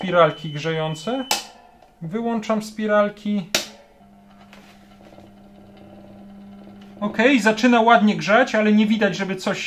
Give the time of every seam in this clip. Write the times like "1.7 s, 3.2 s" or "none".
4.0 s